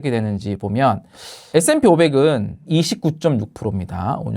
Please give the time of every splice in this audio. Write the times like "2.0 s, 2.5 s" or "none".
1.5 s, 2.6 s